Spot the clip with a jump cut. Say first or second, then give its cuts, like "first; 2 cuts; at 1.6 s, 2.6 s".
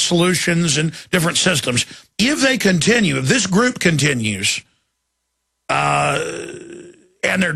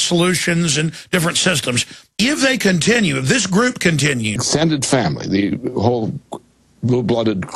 first; 1 cut; at 4.4 s